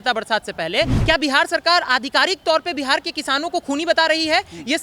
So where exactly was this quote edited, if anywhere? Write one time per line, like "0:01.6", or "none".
0:01.0